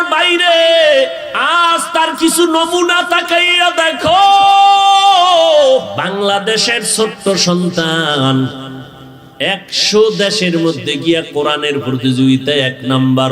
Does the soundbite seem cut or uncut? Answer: cut